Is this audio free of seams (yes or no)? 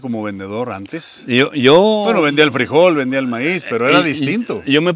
yes